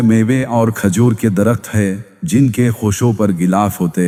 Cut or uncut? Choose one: uncut